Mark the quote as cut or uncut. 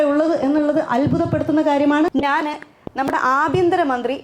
cut